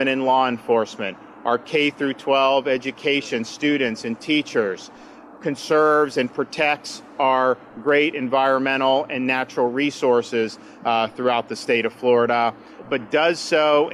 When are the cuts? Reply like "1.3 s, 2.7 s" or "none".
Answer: 5.3 s, 12.8 s